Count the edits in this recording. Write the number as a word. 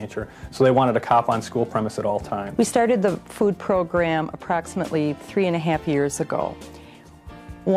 one